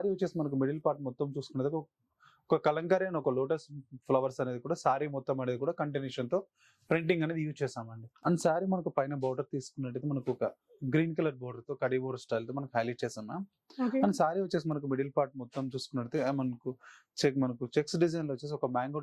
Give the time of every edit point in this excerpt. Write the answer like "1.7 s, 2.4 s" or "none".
8.1 s